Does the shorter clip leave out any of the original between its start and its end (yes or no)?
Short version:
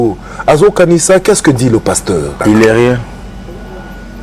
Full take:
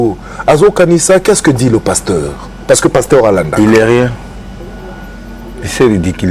yes